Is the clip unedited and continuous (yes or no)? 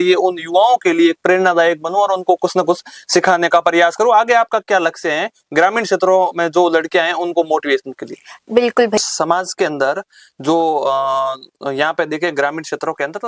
no